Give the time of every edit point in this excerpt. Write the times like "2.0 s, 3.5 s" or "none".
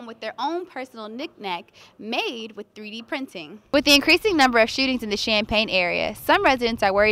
3.5 s

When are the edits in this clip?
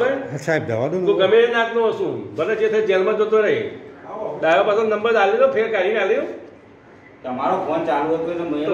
none

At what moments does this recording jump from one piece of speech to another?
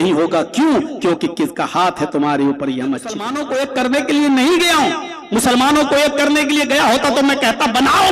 3.3 s

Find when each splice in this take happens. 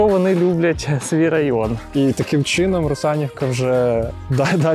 1.8 s

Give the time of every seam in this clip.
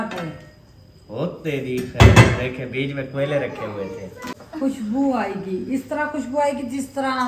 4.4 s

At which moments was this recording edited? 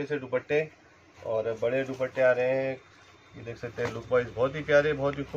none

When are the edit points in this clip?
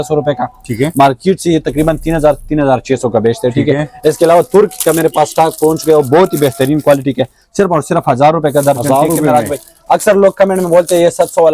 none

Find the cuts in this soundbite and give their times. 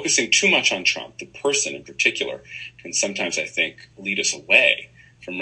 3.8 s

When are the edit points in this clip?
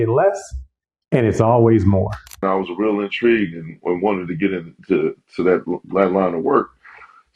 2.3 s

